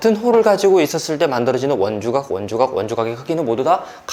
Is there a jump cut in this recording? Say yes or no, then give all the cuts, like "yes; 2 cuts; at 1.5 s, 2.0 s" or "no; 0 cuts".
no; 0 cuts